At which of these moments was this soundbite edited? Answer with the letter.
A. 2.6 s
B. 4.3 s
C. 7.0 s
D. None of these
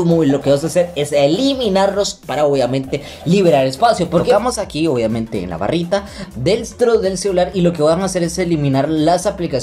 B